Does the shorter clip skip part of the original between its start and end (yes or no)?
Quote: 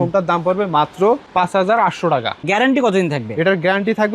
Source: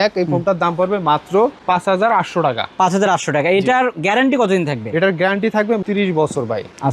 yes